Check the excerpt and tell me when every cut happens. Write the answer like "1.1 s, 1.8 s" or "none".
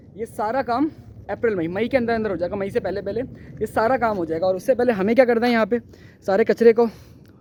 none